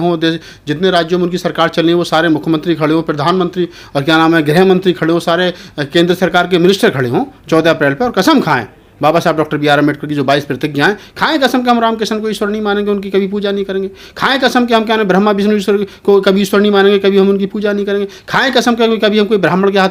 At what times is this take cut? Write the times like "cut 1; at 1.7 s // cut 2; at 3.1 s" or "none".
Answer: none